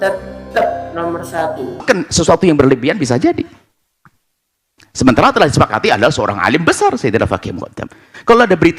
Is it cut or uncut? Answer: cut